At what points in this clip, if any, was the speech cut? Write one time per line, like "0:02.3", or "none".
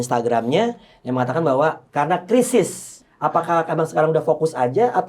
0:03.0